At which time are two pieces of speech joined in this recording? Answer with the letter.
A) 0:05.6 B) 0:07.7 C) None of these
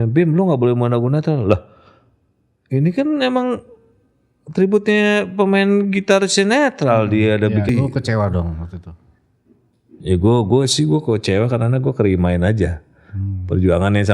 B